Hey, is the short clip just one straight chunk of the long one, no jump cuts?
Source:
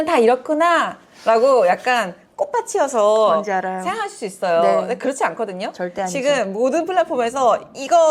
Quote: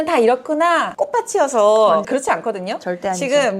no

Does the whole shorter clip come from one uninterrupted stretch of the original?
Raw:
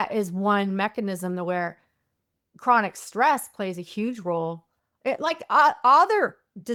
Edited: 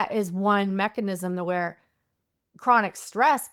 yes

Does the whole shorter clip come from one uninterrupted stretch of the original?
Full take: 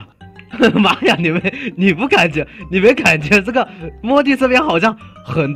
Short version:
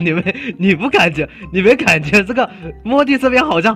yes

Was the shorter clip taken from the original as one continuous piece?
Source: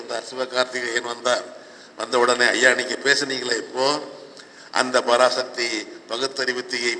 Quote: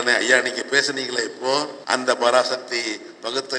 no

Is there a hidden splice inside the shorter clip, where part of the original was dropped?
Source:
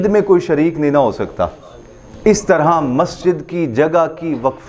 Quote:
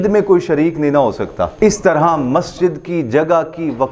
yes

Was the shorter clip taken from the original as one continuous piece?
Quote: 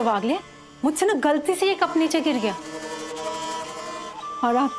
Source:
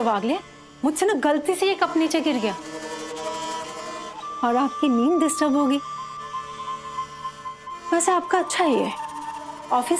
yes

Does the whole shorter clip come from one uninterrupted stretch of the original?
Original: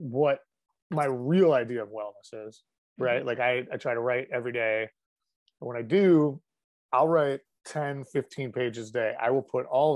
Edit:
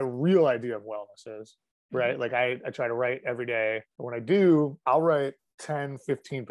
no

